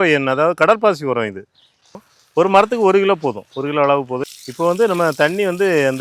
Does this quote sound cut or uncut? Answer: cut